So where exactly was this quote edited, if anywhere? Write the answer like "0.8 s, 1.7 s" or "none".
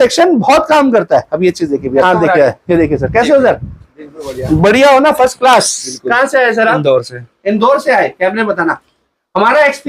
2.0 s